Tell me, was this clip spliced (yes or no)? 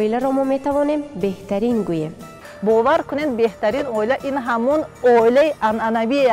no